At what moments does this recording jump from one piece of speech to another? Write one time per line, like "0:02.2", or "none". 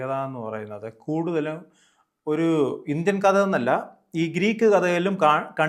none